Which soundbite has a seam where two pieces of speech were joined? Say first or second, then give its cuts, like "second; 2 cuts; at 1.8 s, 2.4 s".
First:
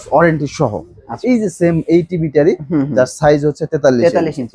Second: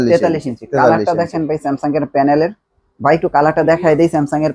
first; 1 cut; at 1.2 s